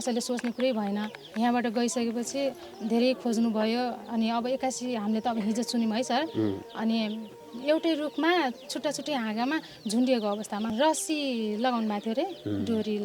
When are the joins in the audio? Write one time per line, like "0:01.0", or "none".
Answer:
0:01.2
0:07.5
0:10.7